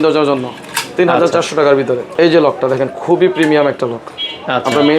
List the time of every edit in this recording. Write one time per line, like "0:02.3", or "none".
0:02.1